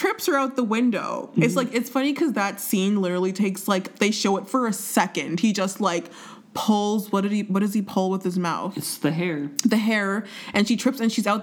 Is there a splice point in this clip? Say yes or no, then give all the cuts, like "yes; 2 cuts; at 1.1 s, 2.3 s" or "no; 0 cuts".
no; 0 cuts